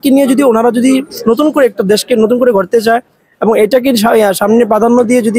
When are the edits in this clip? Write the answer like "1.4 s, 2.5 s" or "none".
none